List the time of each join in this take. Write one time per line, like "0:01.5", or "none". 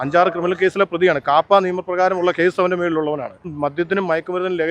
0:03.5